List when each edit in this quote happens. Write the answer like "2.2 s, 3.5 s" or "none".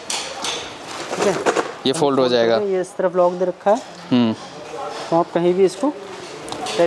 none